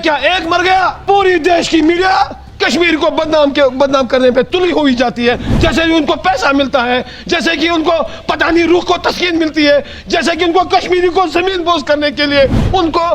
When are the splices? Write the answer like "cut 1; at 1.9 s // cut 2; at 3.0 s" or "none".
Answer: cut 1; at 1.0 s